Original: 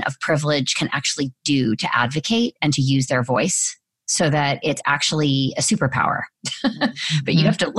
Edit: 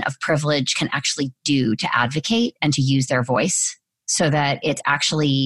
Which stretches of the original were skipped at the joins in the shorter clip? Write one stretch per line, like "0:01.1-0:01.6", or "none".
none